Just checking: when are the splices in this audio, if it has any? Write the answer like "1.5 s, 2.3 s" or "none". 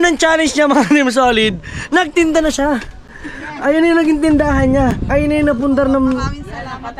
none